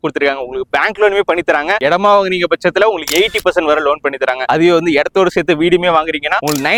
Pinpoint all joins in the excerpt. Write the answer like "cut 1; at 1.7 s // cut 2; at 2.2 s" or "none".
none

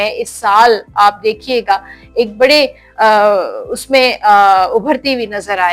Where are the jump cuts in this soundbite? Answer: none

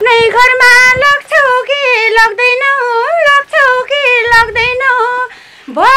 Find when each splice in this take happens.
none

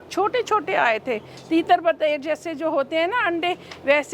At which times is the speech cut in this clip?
none

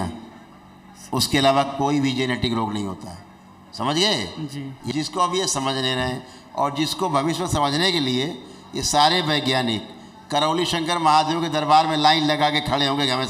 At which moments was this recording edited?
cut 1; at 4.8 s

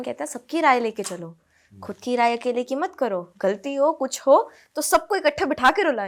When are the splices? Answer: none

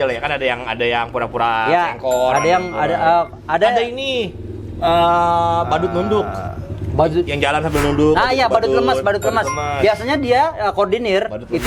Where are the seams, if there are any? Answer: none

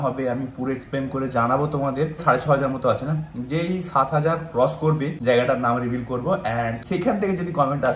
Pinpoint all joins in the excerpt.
cut 1; at 2.2 s // cut 2; at 5.1 s // cut 3; at 6.8 s

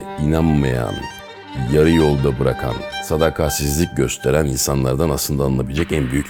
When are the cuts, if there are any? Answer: none

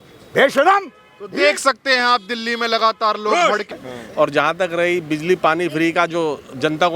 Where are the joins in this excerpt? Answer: cut 1; at 3.8 s

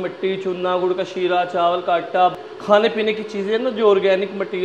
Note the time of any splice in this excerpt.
cut 1; at 2.3 s

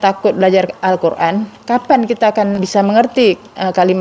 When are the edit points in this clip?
cut 1; at 2.6 s

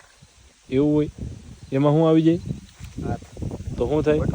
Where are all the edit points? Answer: cut 1; at 2.7 s

